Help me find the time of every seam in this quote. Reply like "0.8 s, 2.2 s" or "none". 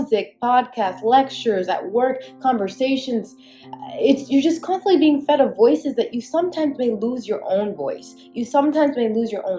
none